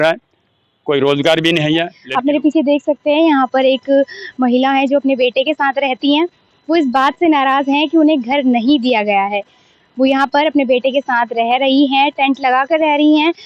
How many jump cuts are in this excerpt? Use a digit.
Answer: 1